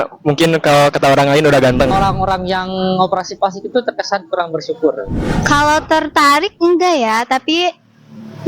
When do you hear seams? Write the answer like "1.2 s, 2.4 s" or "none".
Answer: 1.9 s, 5.3 s